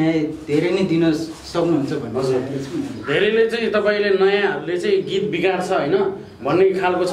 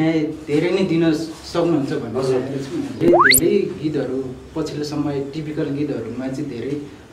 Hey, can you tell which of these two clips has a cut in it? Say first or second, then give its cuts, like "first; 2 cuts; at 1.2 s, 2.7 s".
second; 1 cut; at 3.0 s